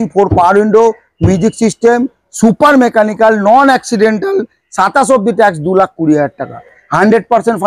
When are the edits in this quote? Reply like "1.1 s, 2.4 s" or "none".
none